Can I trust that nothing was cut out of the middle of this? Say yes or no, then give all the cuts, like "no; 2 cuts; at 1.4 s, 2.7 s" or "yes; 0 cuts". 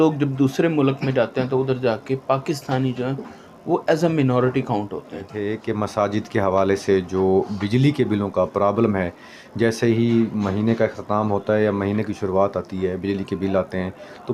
yes; 0 cuts